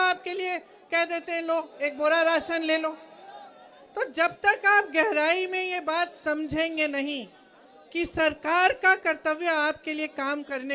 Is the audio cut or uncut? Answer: uncut